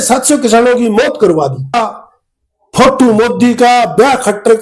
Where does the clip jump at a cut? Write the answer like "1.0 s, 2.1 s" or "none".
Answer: 1.7 s